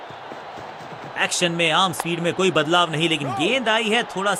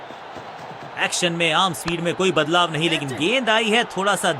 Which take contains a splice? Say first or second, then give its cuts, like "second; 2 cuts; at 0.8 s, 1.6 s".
second; 1 cut; at 1.0 s